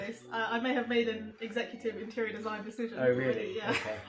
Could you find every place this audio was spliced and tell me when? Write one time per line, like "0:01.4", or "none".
none